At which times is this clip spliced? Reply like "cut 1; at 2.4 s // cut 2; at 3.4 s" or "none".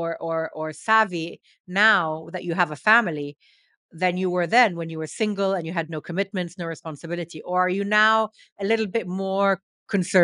none